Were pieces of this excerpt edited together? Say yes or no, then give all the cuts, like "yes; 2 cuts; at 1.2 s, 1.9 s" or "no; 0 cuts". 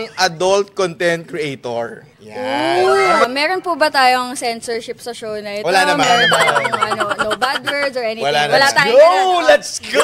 yes; 1 cut; at 3.2 s